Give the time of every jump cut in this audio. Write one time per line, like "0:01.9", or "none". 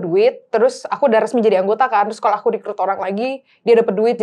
none